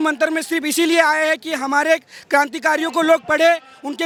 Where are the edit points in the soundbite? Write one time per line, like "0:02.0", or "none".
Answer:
none